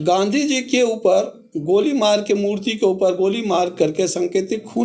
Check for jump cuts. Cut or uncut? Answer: uncut